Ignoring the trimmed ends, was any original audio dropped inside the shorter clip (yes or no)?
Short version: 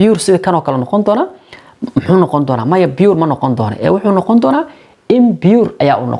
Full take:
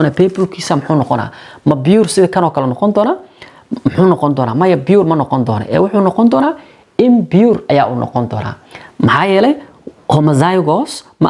no